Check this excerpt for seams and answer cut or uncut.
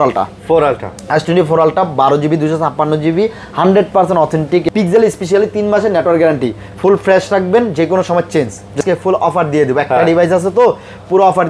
cut